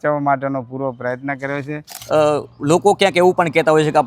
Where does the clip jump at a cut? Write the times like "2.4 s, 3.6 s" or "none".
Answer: 1.9 s